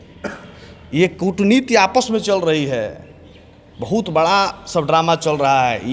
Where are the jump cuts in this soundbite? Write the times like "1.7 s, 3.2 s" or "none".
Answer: none

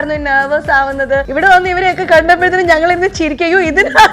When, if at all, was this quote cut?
1.3 s

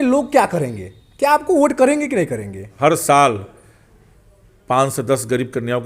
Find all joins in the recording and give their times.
2.8 s

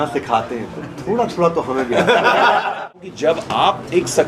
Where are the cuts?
2.9 s

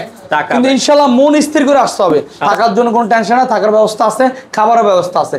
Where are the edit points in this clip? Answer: 2.3 s

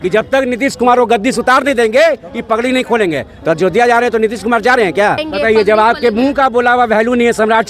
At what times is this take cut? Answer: 5.2 s

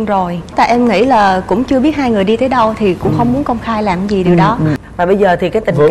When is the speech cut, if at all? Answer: 4.8 s

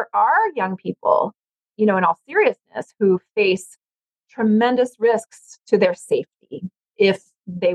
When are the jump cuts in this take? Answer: none

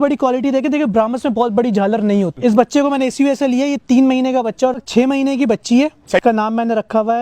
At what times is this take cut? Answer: 2.4 s, 4.8 s, 6.2 s

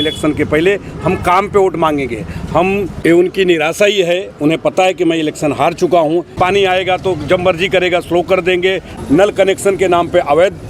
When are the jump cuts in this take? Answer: 2.9 s, 6.3 s, 8.9 s

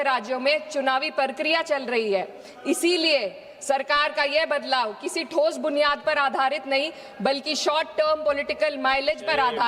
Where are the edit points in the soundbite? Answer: none

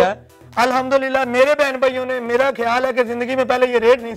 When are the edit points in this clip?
none

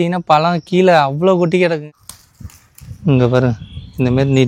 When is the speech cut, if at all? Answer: 1.9 s

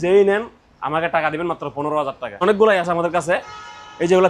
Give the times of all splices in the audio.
2.4 s

